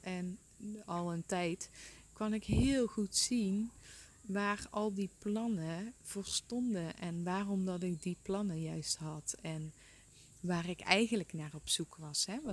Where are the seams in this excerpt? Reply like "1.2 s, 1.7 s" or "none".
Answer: 10.0 s